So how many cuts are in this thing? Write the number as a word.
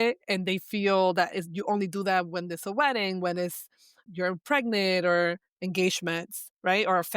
one